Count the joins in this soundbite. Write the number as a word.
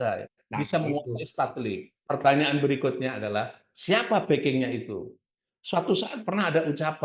one